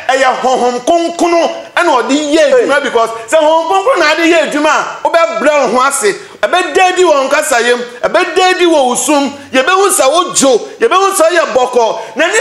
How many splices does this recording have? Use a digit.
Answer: 0